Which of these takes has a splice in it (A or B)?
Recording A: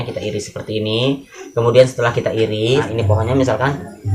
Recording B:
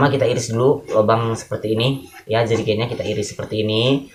A